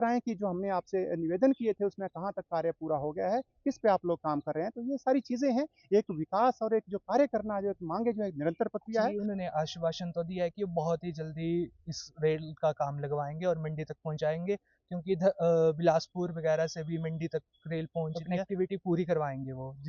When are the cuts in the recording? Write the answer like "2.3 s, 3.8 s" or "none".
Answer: 9.2 s, 18.3 s